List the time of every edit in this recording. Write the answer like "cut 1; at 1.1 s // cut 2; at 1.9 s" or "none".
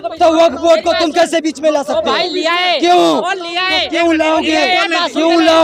none